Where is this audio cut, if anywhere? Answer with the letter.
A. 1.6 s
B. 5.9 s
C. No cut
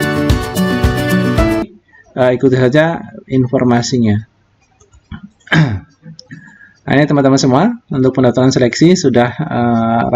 A